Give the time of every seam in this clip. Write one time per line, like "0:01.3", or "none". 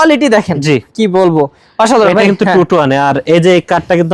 none

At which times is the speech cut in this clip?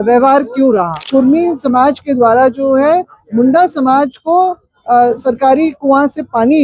0:01.0

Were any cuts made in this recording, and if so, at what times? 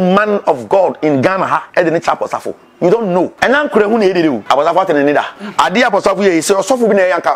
0:01.7
0:03.3
0:04.4
0:05.4

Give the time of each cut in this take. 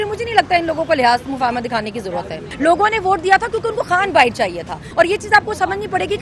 0:02.4
0:04.8

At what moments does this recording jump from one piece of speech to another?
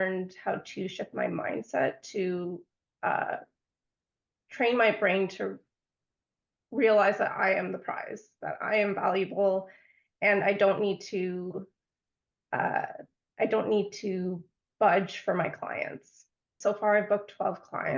0:16.5

